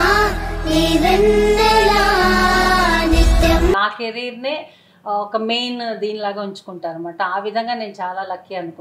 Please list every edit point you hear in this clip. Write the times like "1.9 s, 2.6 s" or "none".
3.8 s